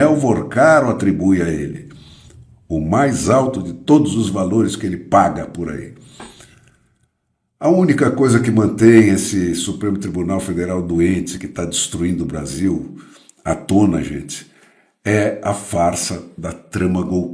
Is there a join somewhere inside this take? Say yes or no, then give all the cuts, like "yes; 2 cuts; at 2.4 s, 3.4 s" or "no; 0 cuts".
no; 0 cuts